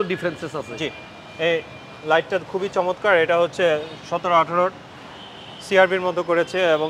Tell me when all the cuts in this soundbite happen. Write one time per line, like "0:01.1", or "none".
none